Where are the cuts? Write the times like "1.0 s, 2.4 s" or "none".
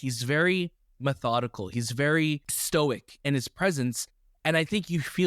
2.5 s